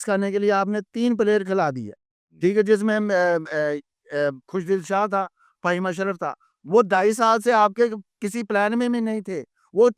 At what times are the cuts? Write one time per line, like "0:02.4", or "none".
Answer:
none